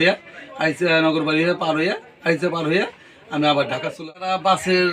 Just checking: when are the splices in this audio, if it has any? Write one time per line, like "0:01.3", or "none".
0:04.0